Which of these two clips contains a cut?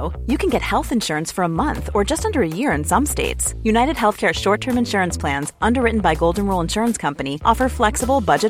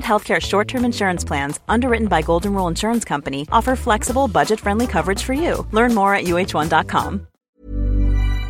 second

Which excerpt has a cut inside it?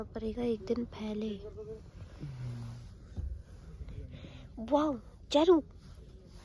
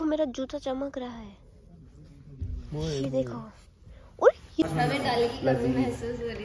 second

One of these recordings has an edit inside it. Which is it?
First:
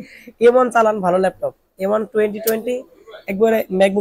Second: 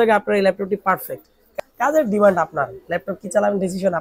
second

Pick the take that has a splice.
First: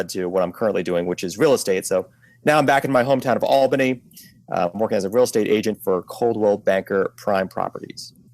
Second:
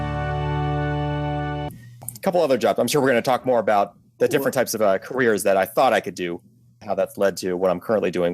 second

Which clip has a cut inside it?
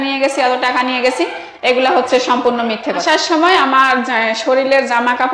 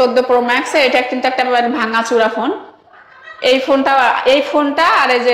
first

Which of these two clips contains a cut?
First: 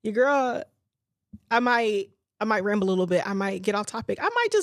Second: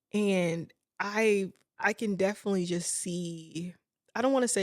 second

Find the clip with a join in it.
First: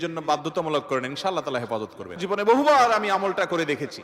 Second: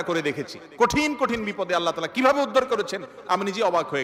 first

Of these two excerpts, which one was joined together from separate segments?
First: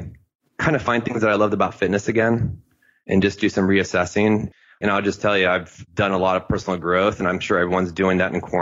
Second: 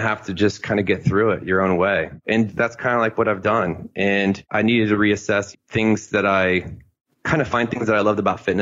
first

